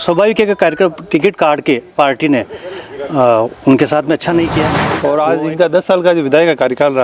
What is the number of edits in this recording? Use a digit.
1